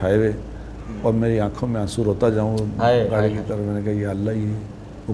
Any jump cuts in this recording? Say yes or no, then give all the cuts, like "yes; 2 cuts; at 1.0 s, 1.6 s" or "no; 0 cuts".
no; 0 cuts